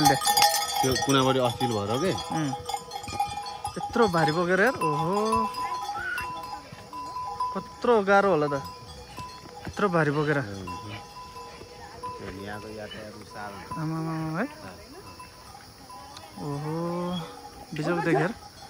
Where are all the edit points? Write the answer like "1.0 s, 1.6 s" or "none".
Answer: none